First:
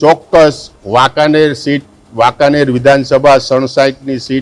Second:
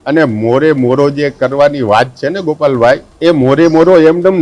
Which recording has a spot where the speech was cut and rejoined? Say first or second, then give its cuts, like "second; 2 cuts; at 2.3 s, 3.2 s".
second; 1 cut; at 3.1 s